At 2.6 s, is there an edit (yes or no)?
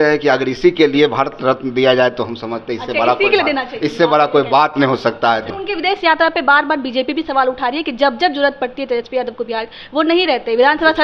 no